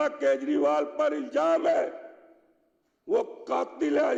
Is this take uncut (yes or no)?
yes